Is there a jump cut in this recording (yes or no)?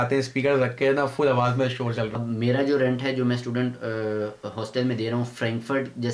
yes